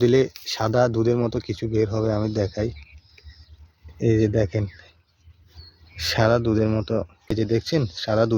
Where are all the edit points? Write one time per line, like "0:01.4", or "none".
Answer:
0:07.3